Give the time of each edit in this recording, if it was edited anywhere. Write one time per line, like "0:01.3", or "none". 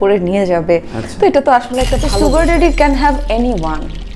0:02.0